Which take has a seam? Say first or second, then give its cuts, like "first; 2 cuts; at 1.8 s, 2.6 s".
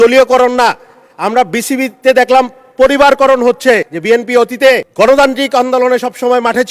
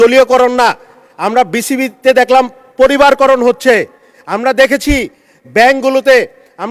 first; 2 cuts; at 3.9 s, 4.9 s